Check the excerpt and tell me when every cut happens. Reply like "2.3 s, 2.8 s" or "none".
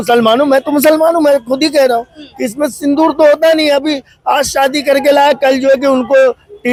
none